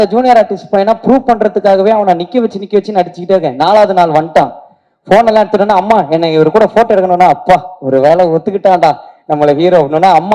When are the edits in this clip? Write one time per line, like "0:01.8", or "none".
none